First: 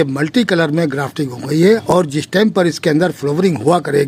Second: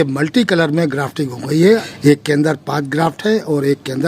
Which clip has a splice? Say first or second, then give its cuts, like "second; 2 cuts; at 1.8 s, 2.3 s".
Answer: second; 1 cut; at 1.8 s